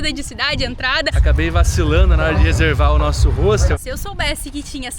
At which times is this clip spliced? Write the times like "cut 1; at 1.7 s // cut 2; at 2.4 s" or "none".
cut 1; at 1.2 s // cut 2; at 3.8 s